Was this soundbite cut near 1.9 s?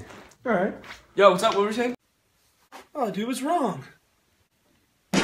yes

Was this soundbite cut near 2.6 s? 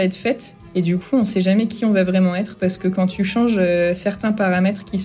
no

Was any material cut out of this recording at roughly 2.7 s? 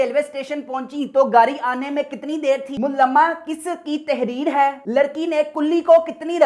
no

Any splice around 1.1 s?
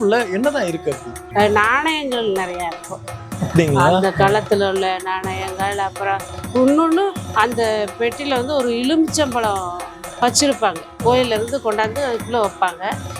yes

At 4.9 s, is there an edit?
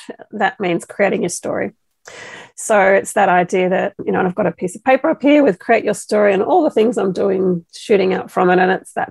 no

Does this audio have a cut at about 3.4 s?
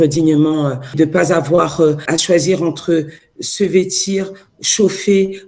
no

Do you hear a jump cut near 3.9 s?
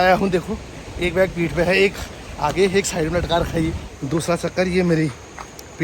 yes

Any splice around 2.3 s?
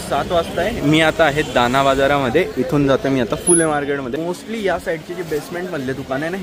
no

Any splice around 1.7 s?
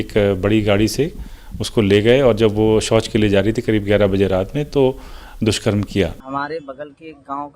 no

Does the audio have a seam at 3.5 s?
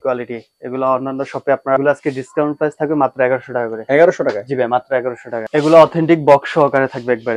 no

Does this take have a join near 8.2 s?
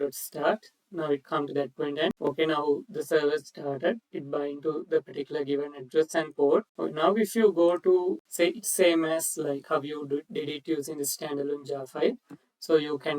yes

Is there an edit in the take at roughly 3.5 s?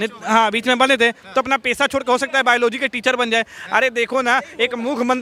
no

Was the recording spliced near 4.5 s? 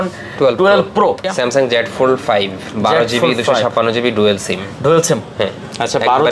no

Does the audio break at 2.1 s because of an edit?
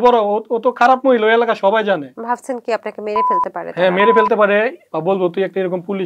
yes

